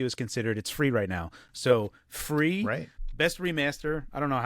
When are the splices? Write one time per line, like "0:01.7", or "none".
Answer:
0:02.7